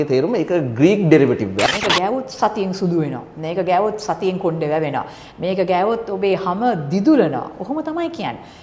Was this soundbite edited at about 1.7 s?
yes; 1 cut; at 1.7 s

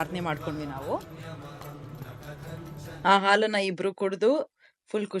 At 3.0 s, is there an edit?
yes; 1 cut; at 3.0 s

